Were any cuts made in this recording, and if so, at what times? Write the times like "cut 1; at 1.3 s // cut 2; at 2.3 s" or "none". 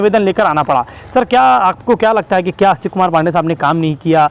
none